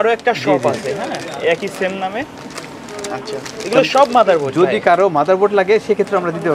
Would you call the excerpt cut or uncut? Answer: uncut